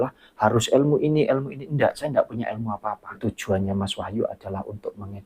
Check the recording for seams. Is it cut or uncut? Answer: cut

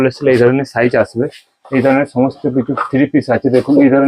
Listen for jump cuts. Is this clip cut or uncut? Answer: uncut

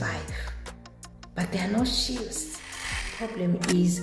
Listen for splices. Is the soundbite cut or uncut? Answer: cut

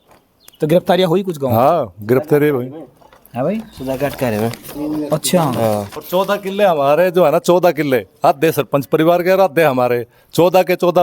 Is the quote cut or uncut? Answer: cut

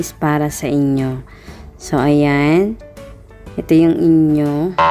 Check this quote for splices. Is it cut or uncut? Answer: uncut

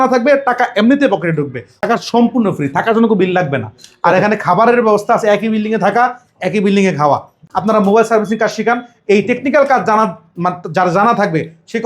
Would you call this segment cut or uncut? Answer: cut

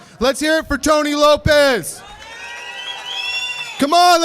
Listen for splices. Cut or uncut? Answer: cut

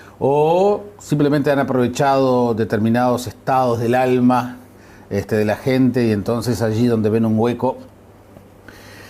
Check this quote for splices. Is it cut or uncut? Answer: cut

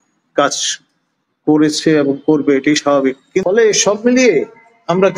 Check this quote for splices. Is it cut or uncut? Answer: cut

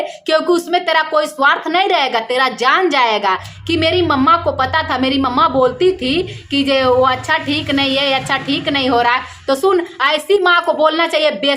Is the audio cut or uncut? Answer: cut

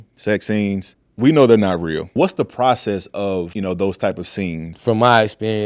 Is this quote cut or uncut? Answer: cut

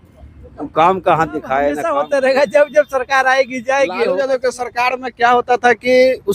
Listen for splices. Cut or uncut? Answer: cut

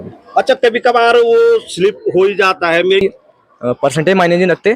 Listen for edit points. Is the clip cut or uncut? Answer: cut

